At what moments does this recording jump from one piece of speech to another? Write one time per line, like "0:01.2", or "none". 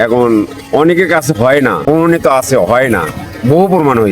0:01.8